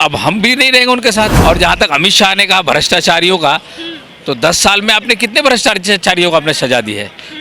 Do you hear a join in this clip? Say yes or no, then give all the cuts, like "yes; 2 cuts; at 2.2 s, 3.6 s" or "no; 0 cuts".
yes; 1 cut; at 1.3 s